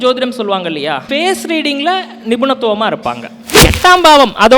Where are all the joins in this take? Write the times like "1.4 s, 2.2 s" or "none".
1.1 s, 3.7 s